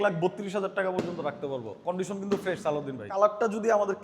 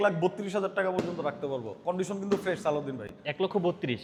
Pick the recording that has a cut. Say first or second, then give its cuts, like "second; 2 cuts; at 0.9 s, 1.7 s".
first; 1 cut; at 3.0 s